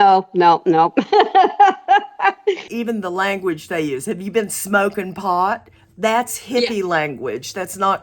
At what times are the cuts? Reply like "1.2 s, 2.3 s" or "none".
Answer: 2.7 s